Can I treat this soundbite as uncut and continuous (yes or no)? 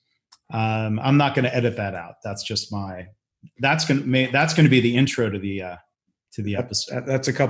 no